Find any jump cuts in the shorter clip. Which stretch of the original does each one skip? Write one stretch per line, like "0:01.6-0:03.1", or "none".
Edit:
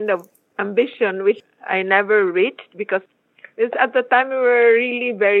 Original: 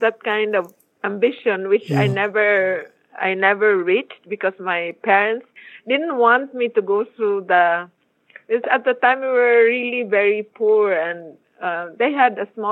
0:01.9-0:02.9
0:04.6-0:08.0